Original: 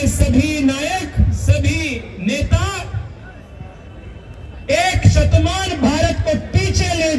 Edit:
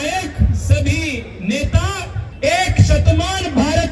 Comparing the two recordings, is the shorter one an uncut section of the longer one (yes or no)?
no